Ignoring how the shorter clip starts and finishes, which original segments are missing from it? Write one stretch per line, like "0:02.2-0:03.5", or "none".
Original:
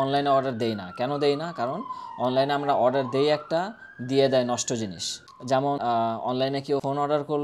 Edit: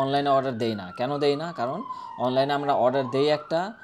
none